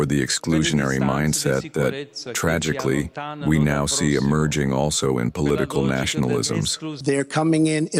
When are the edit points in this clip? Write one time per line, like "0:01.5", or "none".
none